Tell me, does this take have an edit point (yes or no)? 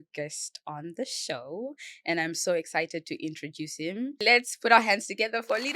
yes